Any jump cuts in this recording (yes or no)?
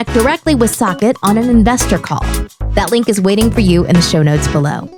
no